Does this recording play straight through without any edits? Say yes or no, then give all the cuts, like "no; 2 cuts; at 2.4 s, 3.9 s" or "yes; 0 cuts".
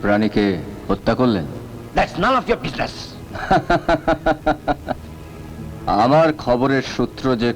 yes; 0 cuts